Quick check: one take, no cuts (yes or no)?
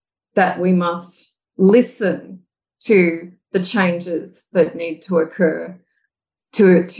no